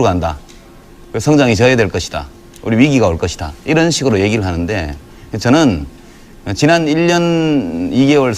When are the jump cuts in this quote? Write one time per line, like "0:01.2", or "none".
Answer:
0:01.5

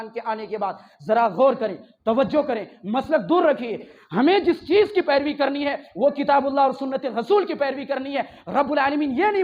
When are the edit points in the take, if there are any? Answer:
0:03.9

